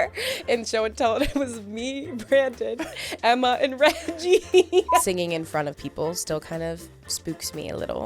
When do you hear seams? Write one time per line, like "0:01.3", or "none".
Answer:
0:05.0